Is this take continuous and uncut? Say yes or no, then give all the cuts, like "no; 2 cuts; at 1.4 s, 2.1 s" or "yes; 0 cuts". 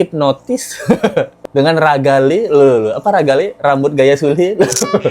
yes; 0 cuts